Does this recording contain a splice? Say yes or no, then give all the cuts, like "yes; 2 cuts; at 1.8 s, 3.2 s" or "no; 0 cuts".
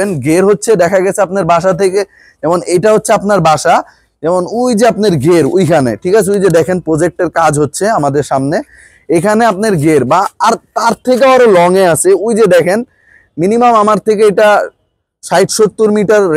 no; 0 cuts